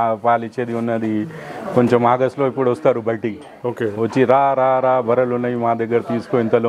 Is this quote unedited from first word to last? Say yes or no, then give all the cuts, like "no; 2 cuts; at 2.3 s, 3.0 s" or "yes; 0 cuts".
yes; 0 cuts